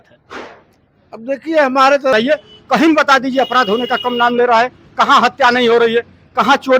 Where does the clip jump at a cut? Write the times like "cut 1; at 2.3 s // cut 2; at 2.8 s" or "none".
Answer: cut 1; at 2.1 s